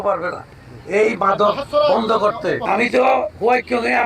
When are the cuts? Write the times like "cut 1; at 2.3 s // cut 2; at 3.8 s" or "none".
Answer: cut 1; at 2.6 s